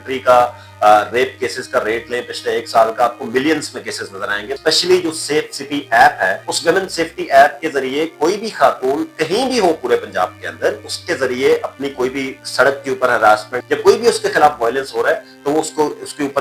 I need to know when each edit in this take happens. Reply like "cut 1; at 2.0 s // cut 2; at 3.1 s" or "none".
cut 1; at 4.5 s // cut 2; at 6.5 s // cut 3; at 10.9 s // cut 4; at 13.5 s